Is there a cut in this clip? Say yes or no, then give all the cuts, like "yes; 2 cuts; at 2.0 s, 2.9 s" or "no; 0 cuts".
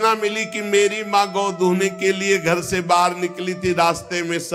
no; 0 cuts